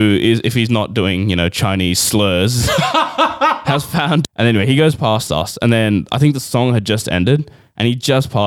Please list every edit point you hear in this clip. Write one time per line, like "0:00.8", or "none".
0:04.3